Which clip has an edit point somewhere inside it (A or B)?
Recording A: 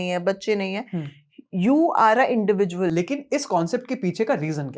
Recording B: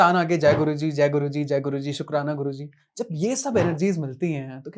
A